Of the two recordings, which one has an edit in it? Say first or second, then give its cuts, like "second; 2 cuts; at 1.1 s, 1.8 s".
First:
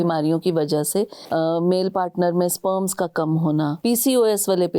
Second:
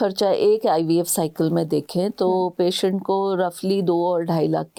first; 2 cuts; at 1.2 s, 3.8 s